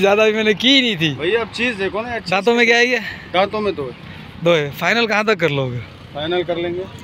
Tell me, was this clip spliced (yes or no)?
no